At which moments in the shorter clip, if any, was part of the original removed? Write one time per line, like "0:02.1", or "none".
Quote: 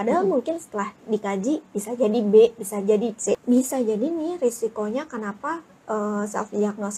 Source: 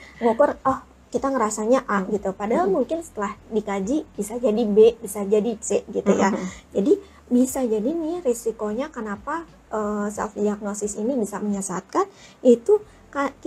0:03.4